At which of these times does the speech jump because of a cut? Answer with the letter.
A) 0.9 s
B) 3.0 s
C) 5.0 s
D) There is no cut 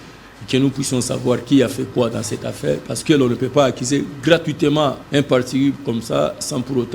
C